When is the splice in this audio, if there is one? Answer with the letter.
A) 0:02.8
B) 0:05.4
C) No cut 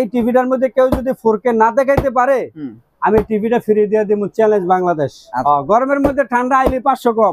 B